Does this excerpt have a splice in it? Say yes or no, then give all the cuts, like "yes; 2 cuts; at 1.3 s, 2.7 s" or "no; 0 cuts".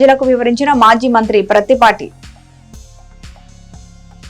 no; 0 cuts